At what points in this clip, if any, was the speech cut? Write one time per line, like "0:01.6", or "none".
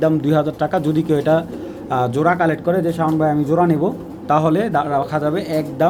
none